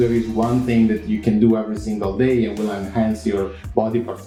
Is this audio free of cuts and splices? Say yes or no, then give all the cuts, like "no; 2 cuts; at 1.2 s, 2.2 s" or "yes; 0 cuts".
yes; 0 cuts